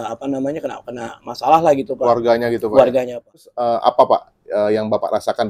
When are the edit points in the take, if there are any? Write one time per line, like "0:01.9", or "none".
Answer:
0:03.5